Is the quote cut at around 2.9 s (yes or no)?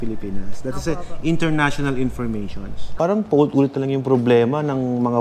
yes